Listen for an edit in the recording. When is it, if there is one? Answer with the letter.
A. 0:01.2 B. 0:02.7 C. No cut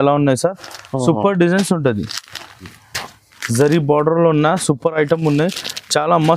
B